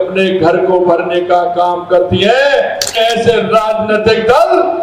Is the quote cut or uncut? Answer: cut